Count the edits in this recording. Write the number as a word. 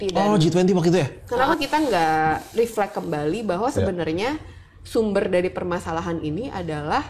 one